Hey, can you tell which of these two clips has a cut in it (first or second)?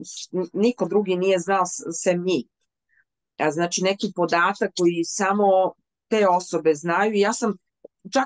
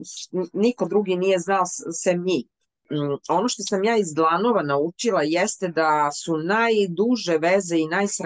second